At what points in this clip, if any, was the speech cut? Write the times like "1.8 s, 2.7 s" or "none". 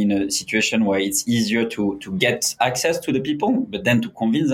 none